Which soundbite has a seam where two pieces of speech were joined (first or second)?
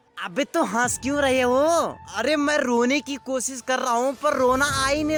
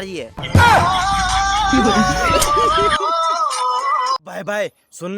second